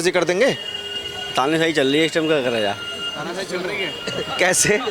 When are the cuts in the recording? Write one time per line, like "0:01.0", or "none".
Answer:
none